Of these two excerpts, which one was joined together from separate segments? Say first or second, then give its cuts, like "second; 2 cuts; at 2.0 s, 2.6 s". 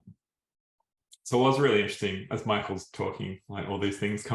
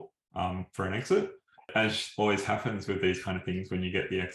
second; 1 cut; at 1.7 s